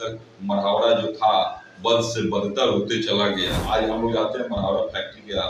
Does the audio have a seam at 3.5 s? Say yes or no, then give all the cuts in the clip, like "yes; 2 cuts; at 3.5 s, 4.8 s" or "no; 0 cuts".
yes; 1 cut; at 3.5 s